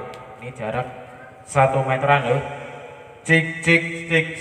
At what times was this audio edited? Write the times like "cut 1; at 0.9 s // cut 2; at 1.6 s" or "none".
none